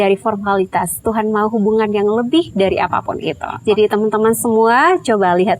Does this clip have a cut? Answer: yes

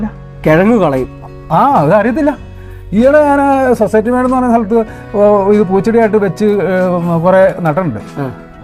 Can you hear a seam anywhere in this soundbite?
no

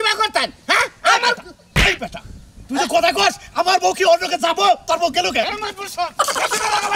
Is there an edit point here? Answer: no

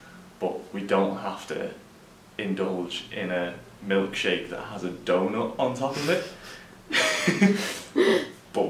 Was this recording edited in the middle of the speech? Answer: no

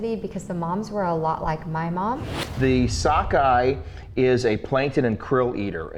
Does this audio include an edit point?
yes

